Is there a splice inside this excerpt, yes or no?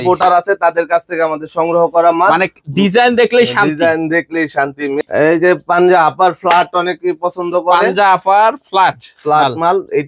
yes